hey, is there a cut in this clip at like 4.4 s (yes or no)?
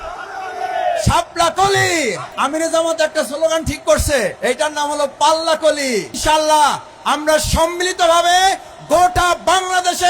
yes